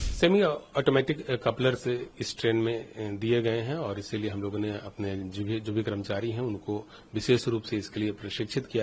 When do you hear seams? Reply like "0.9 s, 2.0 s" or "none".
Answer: none